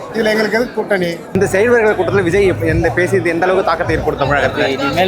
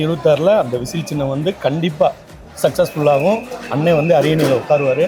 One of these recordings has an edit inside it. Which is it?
first; 1 cut; at 1.2 s

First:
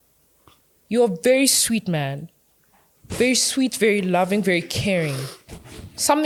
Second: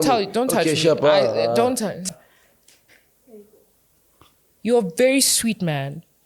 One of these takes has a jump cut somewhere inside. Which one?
second; 1 cut; at 2.0 s

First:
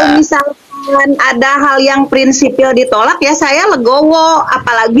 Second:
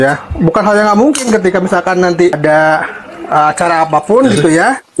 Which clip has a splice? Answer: second; 1 cut; at 2.4 s

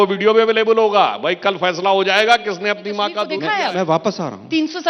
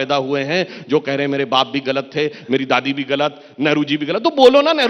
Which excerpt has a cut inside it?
first; 1 cut; at 3.3 s

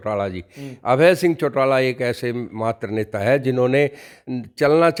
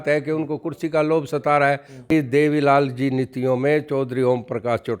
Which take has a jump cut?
second; 1 cut; at 2.1 s

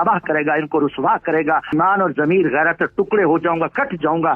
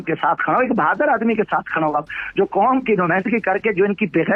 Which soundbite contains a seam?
first; 1 cut; at 1.7 s

